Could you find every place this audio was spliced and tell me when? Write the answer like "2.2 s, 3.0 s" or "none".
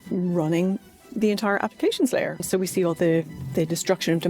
2.4 s